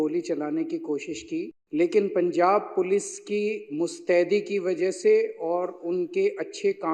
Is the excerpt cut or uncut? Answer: cut